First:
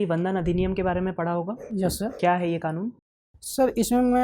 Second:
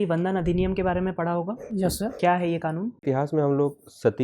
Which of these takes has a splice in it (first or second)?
second